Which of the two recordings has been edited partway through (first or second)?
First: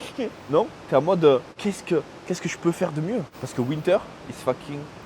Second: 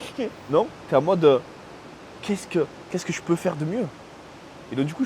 first